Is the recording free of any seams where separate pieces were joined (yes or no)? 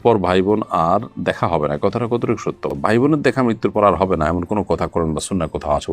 yes